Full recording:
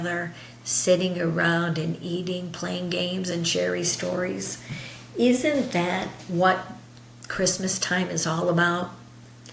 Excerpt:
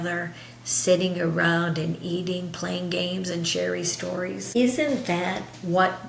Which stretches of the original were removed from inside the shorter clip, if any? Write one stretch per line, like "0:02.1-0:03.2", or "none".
0:04.5-0:05.1